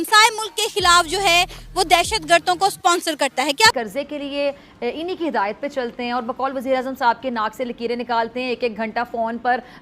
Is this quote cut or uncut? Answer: cut